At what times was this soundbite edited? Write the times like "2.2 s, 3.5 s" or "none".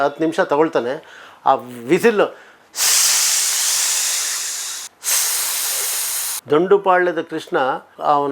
6.4 s